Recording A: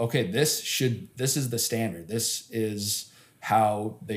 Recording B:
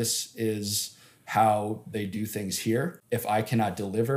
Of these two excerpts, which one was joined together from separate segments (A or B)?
B